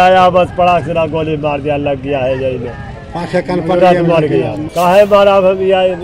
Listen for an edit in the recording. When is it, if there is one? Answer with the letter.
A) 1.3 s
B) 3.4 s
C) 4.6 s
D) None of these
C